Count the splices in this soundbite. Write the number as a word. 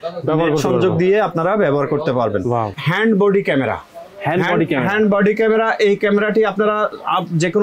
one